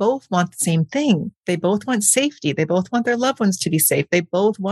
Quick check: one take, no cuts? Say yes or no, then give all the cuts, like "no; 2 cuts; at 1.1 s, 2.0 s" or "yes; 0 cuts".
no; 1 cut; at 1.3 s